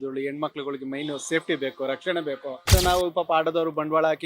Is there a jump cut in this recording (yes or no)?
yes